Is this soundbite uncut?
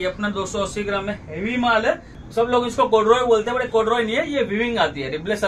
no; 1 cut; at 2.2 s

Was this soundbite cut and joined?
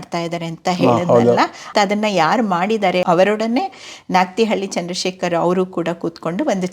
yes; 2 cuts; at 1.6 s, 3.0 s

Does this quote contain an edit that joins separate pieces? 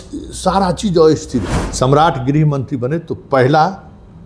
yes; 1 cut; at 1.6 s

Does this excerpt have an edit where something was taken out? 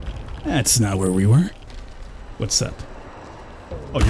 yes; 1 cut; at 1.8 s

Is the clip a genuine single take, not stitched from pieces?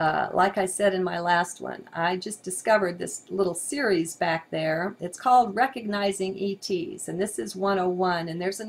no; 1 cut; at 7.3 s

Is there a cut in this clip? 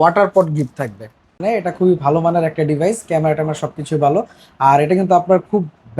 yes; 1 cut; at 1.4 s

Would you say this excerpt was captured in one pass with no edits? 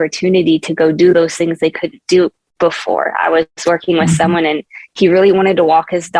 yes; 0 cuts

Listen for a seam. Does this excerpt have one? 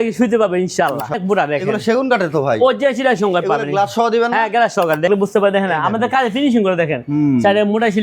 yes; 2 cuts; at 1.1 s, 5.1 s

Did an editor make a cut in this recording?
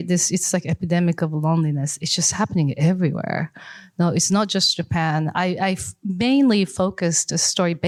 no; 0 cuts

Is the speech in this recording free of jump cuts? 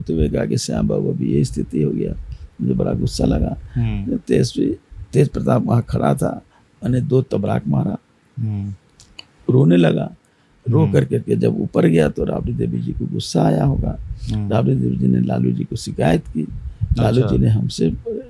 yes; 0 cuts

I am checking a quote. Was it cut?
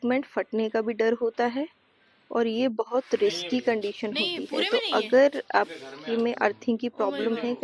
no; 0 cuts

